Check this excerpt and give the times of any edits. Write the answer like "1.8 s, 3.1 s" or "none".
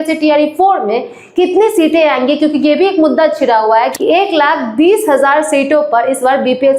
3.9 s